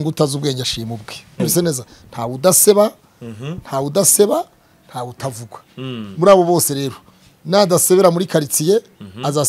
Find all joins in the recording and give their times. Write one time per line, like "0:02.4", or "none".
0:01.4